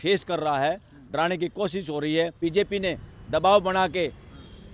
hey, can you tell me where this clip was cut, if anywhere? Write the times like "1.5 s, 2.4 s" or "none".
2.4 s